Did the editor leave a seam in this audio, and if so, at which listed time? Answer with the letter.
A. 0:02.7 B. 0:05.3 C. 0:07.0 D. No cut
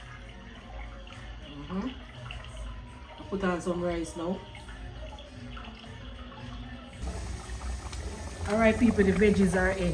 C